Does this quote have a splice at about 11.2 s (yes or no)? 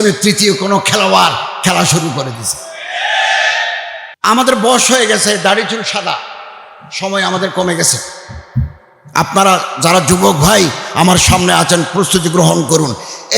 no